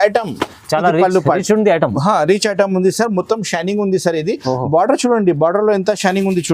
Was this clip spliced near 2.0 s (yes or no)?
no